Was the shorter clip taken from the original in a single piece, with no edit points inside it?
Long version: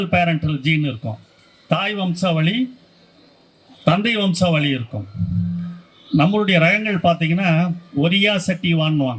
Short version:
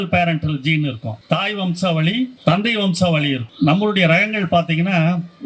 no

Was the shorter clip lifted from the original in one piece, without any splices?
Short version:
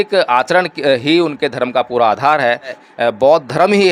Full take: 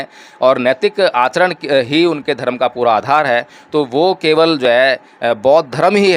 no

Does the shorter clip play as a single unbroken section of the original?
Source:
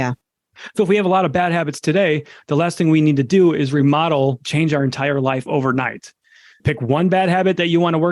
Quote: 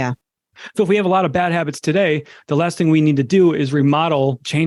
yes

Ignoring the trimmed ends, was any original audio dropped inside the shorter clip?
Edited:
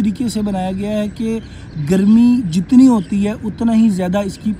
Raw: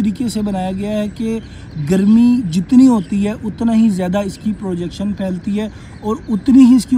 no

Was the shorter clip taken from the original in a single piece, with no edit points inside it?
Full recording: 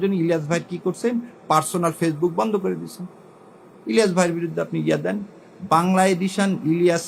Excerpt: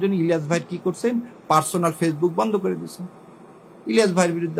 yes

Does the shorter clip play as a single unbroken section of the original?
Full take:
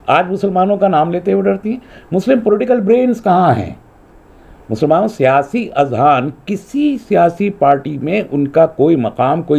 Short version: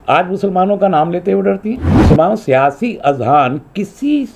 no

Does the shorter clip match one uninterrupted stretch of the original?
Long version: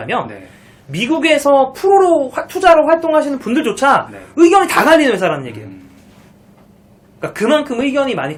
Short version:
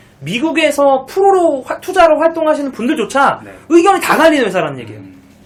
yes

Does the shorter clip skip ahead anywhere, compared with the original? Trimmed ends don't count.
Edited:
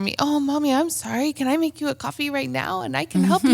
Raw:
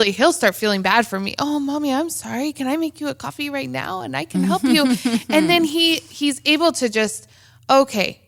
no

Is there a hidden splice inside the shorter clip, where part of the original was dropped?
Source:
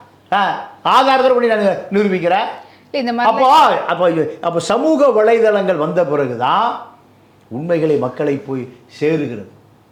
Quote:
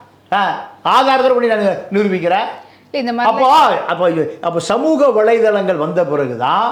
no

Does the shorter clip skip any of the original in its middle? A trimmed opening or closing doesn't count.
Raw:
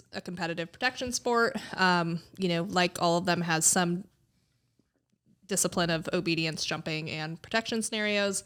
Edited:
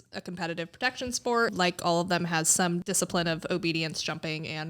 yes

